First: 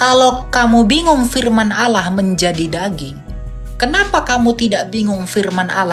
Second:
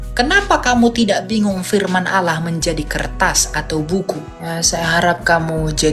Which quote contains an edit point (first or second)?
second